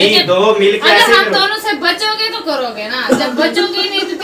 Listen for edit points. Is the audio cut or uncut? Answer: uncut